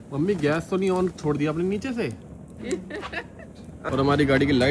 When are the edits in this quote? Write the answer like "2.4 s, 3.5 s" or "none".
3.8 s